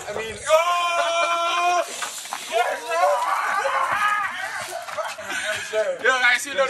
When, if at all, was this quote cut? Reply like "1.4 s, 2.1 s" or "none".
5.2 s